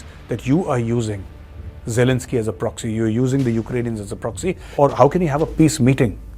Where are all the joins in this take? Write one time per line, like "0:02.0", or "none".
0:04.6